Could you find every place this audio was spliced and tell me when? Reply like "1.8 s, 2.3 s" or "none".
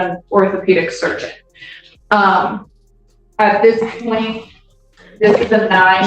none